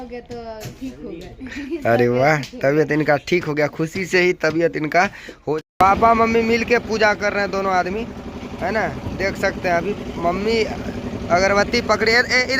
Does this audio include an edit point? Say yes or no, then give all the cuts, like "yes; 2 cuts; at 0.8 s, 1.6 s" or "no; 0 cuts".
yes; 1 cut; at 5.4 s